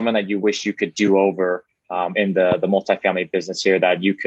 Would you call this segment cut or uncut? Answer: uncut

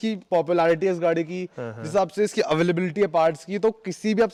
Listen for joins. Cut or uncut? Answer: uncut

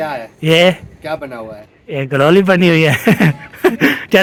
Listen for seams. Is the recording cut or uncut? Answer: uncut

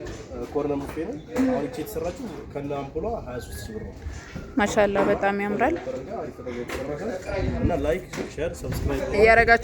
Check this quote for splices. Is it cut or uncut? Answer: uncut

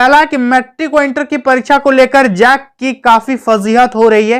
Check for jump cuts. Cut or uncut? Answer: uncut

